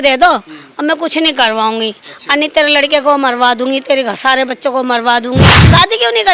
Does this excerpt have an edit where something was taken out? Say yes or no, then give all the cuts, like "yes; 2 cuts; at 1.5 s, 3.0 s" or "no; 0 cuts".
yes; 1 cut; at 5.4 s